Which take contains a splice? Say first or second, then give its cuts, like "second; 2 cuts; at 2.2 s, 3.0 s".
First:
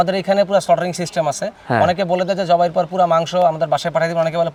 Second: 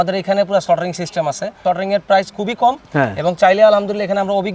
second; 1 cut; at 1.6 s